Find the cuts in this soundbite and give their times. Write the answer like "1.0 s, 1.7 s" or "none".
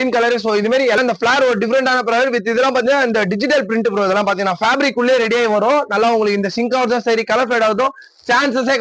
1.0 s